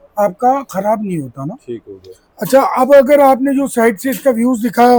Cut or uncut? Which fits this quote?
uncut